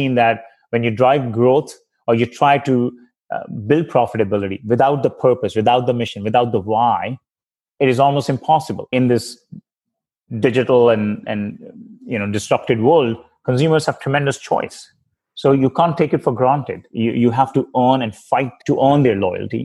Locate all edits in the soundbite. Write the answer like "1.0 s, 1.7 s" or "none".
8.9 s, 18.6 s